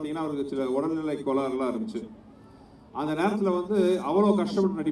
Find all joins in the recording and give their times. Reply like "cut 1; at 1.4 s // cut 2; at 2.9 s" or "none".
none